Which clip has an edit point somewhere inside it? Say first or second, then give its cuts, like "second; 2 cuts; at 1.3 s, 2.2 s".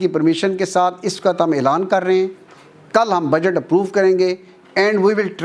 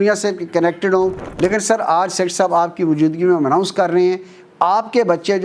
second; 1 cut; at 1.2 s